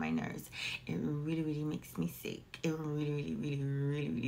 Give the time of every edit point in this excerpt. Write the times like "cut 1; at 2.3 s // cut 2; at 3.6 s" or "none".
none